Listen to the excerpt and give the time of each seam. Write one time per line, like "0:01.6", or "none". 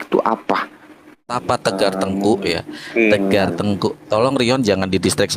0:01.4